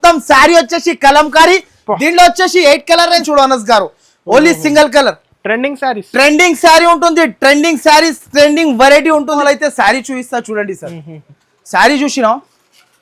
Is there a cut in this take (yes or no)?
yes